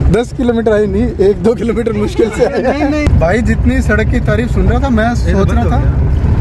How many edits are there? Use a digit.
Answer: 0